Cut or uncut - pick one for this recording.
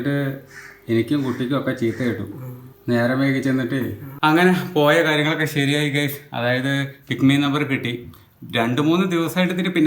cut